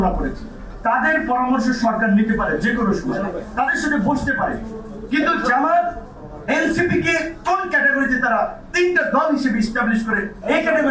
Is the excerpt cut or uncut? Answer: uncut